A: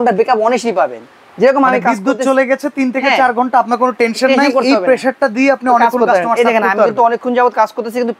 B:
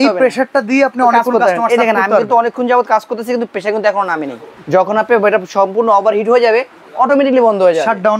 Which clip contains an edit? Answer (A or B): B